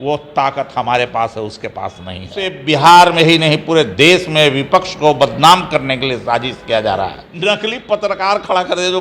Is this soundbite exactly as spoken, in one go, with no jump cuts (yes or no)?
no